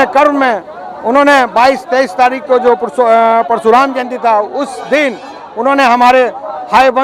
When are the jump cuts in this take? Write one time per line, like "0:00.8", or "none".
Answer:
none

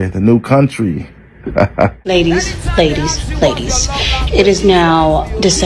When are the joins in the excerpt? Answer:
0:02.1

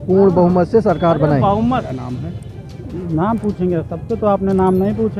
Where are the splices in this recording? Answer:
0:01.9

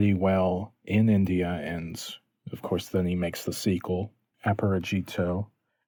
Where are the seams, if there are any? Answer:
none

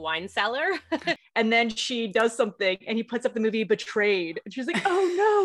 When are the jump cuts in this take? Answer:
0:01.1

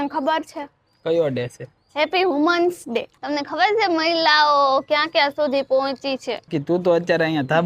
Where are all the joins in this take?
0:03.2
0:06.5

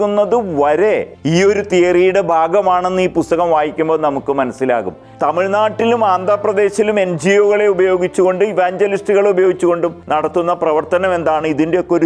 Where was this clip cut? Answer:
0:01.1
0:05.0
0:10.0

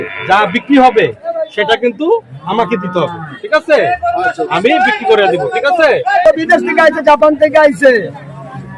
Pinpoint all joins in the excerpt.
0:06.2

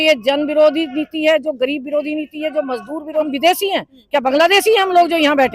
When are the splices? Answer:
0:03.3

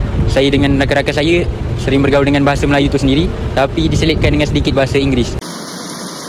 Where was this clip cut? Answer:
0:05.4

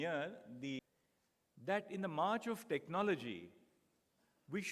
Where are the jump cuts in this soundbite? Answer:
0:00.9

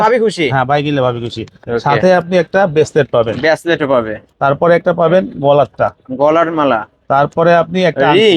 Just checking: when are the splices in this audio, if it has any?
none

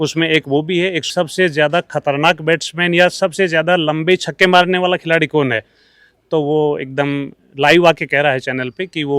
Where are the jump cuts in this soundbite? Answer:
0:01.1

